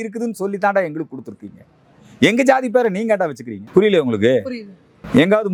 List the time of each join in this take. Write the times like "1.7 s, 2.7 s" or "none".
none